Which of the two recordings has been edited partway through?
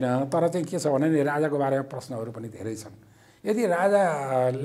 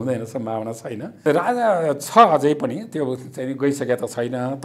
second; 1 cut; at 1.2 s

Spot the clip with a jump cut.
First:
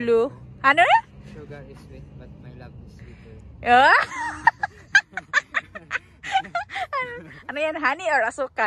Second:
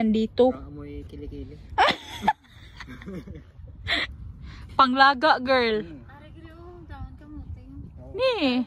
second; 1 cut; at 4.1 s

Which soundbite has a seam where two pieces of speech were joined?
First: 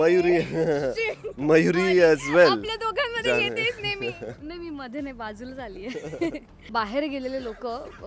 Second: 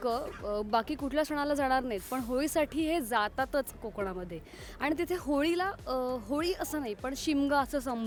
first; 1 cut; at 6.6 s

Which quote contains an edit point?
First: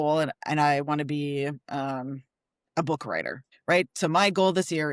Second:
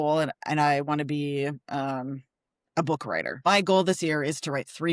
second; 1 cut; at 3.4 s

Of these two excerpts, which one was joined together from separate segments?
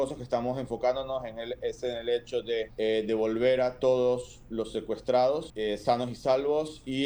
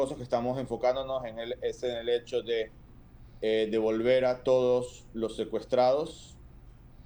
first; 2 cuts; at 2.7 s, 5.5 s

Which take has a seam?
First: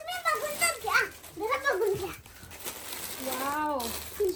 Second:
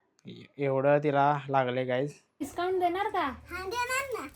second; 1 cut; at 2.5 s

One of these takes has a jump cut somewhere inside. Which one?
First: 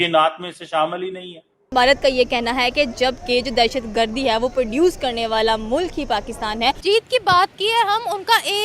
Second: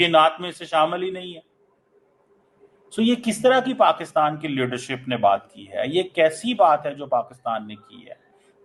first; 2 cuts; at 1.6 s, 6.8 s

